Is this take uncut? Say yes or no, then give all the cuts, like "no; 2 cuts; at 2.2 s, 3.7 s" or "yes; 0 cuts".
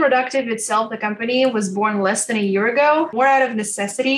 no; 1 cut; at 3.1 s